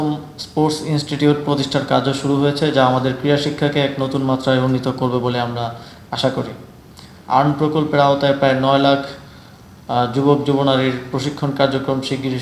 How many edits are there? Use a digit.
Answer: 1